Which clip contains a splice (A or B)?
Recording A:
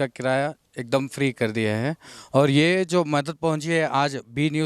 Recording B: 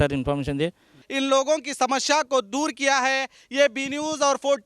B